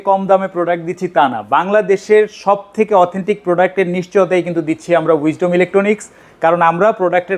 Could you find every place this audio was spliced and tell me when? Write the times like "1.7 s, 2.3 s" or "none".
none